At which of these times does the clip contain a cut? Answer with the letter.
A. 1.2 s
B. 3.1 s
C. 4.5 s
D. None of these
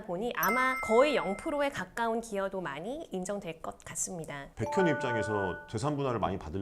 C